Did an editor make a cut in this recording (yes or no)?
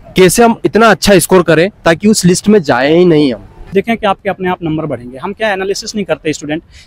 yes